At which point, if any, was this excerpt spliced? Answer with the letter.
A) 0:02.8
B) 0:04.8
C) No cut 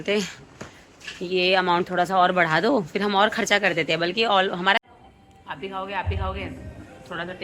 B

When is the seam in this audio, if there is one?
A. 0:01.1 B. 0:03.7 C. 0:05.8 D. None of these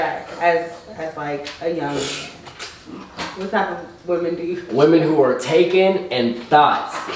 D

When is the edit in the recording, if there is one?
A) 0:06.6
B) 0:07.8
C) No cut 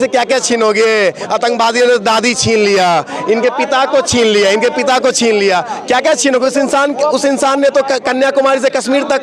C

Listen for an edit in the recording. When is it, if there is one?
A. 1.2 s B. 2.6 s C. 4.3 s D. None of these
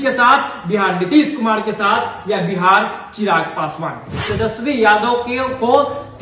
C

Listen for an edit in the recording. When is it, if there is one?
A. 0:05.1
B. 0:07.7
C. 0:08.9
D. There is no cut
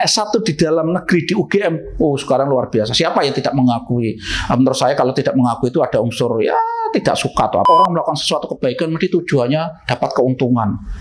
B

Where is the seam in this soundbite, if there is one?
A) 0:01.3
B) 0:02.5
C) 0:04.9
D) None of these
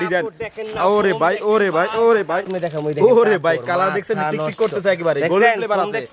B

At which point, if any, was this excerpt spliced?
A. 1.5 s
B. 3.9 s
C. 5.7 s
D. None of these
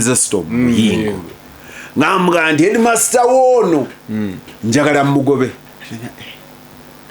C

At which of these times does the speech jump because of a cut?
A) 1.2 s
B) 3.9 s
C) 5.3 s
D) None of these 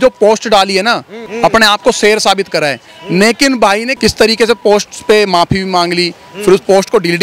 B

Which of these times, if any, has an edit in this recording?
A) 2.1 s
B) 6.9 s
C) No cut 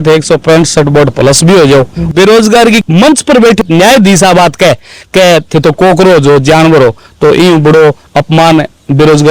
A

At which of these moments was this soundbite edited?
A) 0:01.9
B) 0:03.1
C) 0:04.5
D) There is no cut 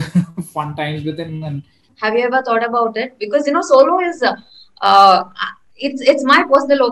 A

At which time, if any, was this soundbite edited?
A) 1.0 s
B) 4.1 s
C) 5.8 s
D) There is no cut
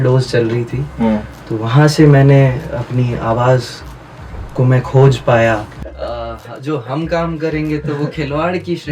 C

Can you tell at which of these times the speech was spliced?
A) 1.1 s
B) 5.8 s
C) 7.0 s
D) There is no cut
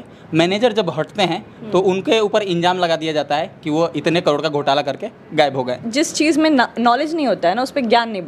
B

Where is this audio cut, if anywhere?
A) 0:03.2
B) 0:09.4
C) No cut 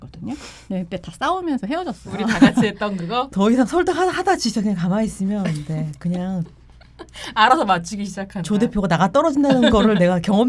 A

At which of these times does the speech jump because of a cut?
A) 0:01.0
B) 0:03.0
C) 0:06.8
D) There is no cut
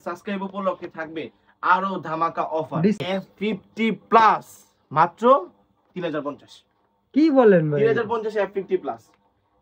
B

